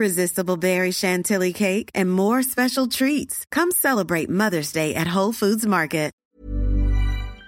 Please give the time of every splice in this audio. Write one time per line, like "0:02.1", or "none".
0:06.2